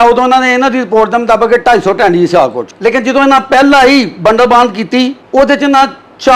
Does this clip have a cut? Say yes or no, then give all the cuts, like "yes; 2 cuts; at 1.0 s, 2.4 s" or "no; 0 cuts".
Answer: yes; 2 cuts; at 2.7 s, 5.2 s